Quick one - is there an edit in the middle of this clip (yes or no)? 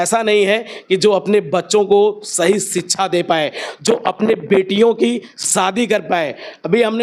no